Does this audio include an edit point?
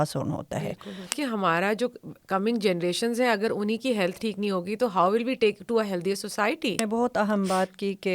yes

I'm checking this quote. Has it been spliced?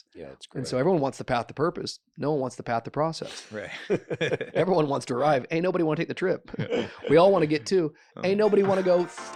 no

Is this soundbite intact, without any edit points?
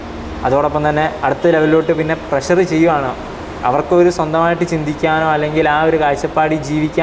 yes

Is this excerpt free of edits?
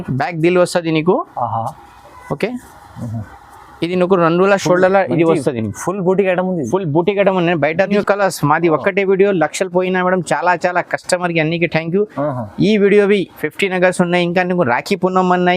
no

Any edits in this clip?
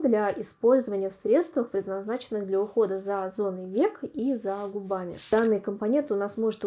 yes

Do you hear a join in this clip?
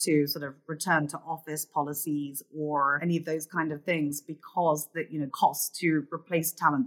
yes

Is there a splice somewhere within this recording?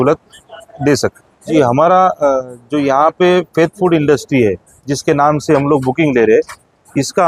yes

